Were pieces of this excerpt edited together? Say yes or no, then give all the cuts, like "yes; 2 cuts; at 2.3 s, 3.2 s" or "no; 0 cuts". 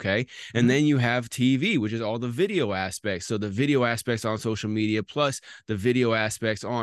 no; 0 cuts